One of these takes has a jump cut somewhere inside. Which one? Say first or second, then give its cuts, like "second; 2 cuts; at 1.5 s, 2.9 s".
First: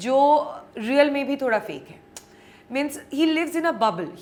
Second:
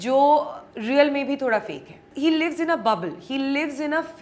second; 1 cut; at 2.1 s